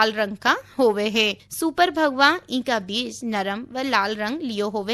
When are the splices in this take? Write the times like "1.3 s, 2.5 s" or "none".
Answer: 1.4 s